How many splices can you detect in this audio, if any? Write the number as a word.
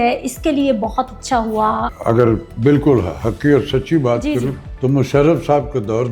two